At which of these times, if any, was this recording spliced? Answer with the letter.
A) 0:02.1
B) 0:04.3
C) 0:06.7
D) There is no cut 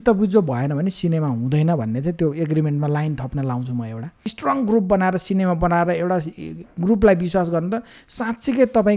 B